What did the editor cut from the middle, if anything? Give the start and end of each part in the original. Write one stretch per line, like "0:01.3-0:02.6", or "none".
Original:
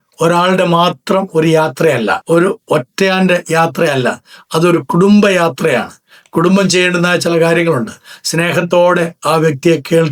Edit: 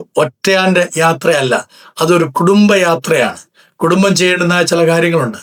none